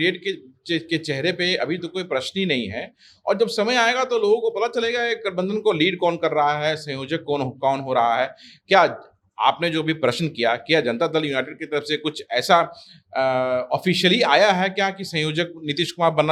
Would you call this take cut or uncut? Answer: uncut